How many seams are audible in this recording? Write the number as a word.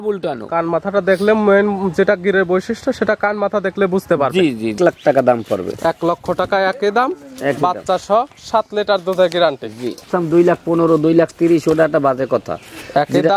two